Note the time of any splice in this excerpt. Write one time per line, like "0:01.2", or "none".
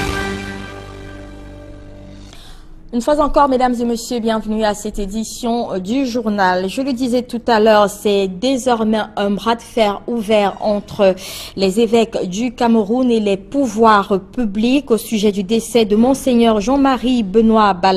0:04.3